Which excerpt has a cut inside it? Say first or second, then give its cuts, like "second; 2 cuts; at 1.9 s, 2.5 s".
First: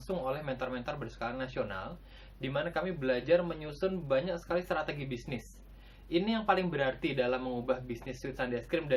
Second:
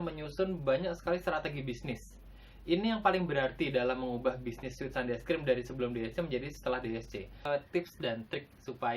second; 1 cut; at 7.5 s